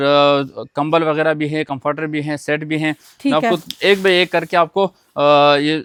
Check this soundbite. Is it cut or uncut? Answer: uncut